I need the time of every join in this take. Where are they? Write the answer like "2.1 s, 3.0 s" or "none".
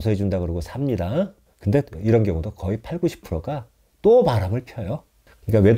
1.5 s